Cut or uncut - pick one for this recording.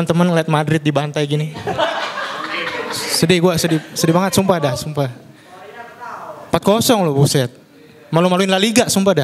uncut